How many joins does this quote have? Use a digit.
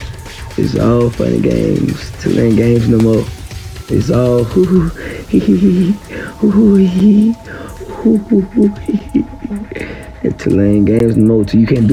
0